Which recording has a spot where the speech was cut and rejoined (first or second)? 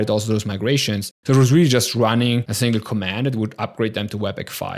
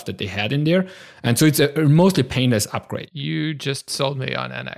first